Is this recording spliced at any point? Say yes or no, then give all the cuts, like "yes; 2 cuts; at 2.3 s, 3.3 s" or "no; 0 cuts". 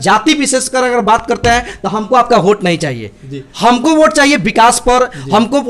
no; 0 cuts